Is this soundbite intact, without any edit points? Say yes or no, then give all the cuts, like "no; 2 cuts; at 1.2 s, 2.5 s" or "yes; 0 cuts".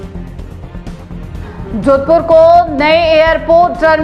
yes; 0 cuts